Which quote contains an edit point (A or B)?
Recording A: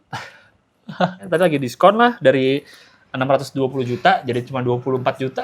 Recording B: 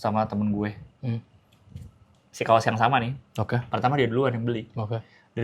A